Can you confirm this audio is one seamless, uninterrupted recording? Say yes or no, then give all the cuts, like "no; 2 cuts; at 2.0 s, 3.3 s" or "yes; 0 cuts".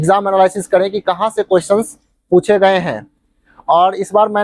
yes; 0 cuts